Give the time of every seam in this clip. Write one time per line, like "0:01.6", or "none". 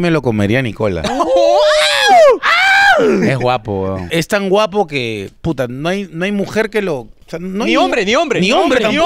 0:04.0